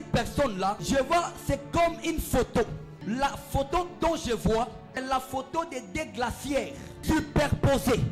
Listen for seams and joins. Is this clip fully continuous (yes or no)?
no